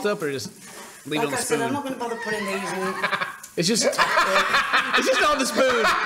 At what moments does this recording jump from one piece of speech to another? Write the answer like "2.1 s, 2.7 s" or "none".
none

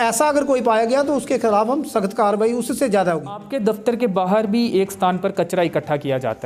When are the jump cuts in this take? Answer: 3.4 s

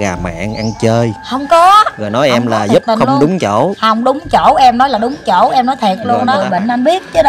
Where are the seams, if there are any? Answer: 6.3 s

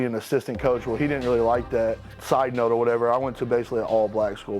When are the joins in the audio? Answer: 2.0 s

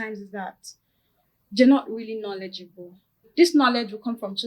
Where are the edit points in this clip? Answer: 3.3 s

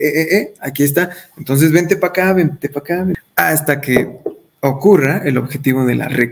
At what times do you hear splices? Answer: 3.2 s

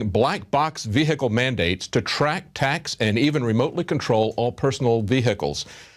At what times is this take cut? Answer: 1.4 s

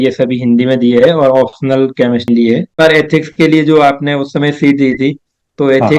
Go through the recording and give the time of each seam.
2.3 s

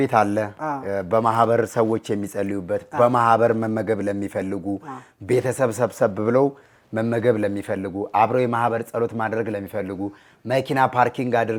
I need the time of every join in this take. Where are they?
none

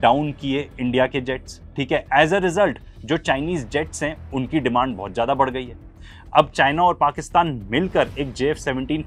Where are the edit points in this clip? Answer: none

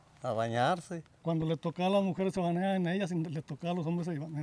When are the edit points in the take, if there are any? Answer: 1.2 s

